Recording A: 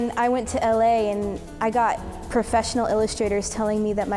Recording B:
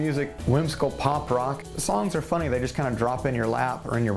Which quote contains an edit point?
B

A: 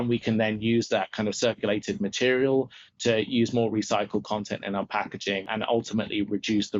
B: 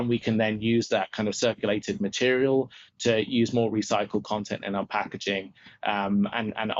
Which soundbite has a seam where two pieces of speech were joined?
A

